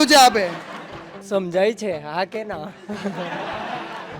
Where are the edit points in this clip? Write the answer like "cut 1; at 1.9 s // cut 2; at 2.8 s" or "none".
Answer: cut 1; at 1.2 s